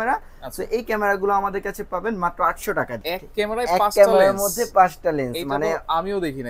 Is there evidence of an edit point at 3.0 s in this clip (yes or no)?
yes